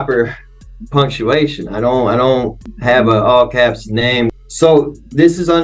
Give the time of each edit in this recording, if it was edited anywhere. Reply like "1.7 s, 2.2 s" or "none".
2.7 s, 4.3 s

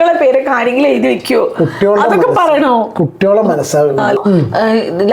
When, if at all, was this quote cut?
4.2 s

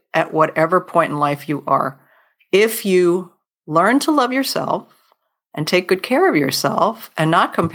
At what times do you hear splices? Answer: 2.3 s

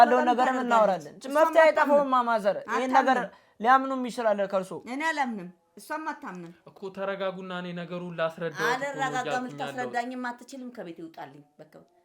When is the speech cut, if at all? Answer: 6.6 s

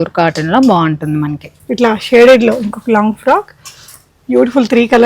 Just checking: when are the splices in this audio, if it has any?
1.5 s

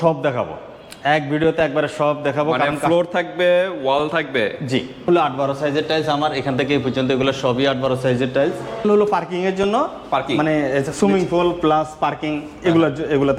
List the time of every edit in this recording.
5.1 s, 8.8 s

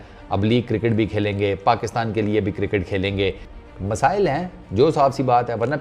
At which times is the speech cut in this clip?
3.5 s

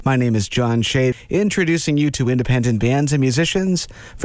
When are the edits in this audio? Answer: 1.1 s

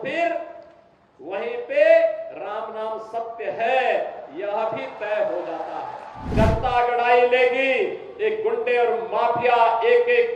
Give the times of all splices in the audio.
6.3 s

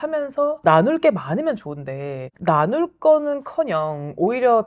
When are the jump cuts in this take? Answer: none

